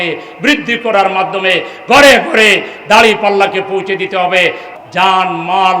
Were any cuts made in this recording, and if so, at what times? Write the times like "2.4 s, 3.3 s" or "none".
4.7 s